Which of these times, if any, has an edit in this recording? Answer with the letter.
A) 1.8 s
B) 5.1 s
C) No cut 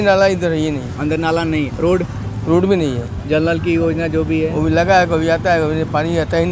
A